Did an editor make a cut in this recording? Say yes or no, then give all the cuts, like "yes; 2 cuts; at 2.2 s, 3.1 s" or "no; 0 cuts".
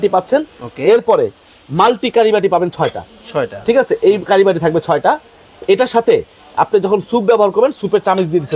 no; 0 cuts